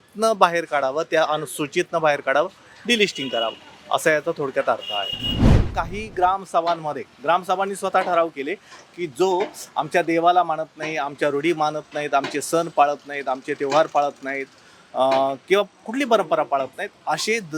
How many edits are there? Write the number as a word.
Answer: one